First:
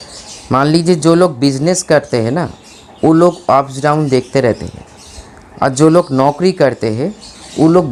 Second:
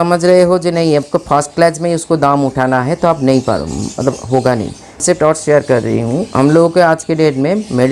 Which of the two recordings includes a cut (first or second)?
second